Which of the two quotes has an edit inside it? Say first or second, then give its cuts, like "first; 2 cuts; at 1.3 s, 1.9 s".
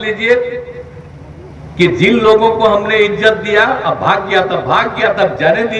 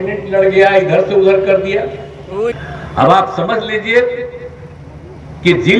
second; 1 cut; at 2.6 s